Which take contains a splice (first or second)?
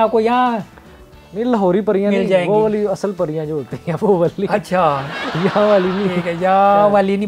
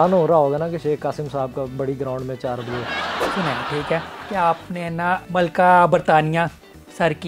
second